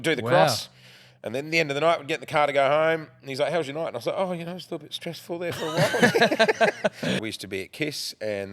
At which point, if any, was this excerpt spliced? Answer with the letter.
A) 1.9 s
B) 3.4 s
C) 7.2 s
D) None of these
C